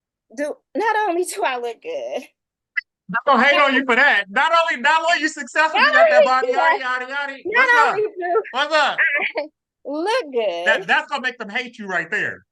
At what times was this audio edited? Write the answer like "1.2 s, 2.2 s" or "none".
none